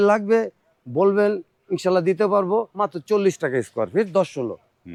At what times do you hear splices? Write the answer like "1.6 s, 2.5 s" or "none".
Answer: none